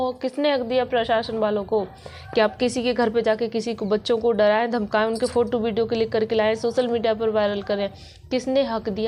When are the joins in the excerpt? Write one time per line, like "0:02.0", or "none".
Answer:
none